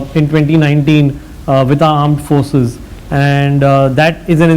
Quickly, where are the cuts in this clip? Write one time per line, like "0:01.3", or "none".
none

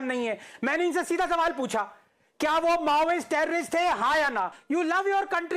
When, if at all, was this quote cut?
0:04.6

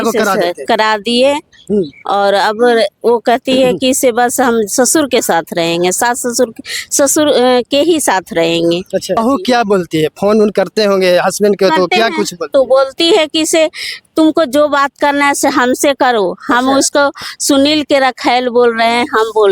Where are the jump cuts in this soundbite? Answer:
0:09.2

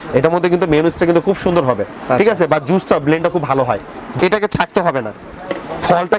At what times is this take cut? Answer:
0:04.1

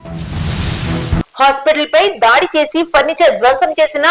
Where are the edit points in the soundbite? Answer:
none

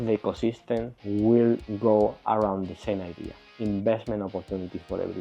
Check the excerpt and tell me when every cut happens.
0:01.0
0:01.7

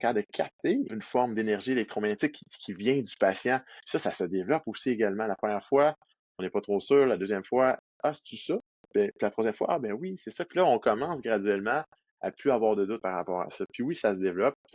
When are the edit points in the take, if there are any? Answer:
0:01.0
0:03.7
0:13.0

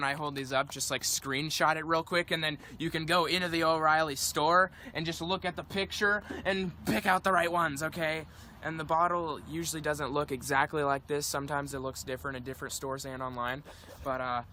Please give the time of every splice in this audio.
0:04.9

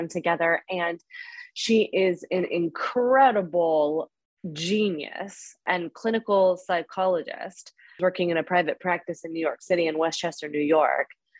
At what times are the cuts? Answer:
0:05.6
0:08.0

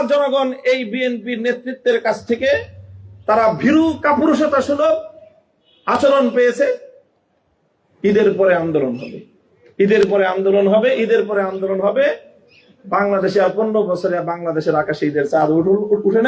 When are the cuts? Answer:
none

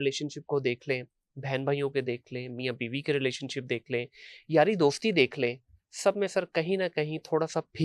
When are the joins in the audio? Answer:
none

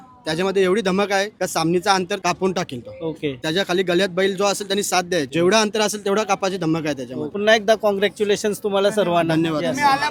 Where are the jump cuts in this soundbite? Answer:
none

